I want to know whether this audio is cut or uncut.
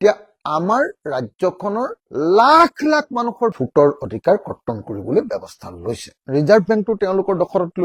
uncut